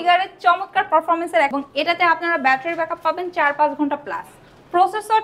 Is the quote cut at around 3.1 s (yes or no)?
no